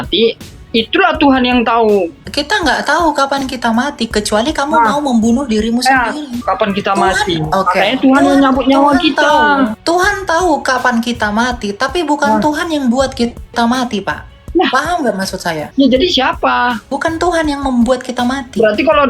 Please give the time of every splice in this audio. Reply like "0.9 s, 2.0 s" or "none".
2.2 s, 6.3 s, 9.8 s, 15.6 s, 16.9 s